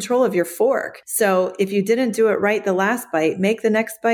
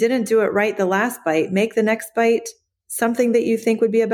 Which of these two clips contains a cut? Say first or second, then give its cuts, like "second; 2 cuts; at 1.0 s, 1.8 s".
first; 1 cut; at 1.0 s